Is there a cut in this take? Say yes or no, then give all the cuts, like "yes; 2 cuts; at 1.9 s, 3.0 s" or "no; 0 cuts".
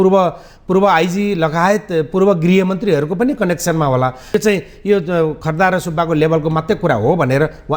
yes; 1 cut; at 4.3 s